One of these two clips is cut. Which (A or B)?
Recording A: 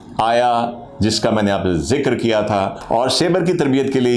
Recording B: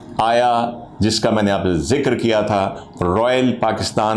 A